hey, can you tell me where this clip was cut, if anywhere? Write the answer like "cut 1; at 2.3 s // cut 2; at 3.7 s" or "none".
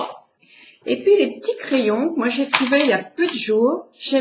cut 1; at 1.2 s